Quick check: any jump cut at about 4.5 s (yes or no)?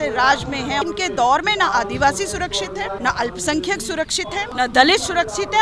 yes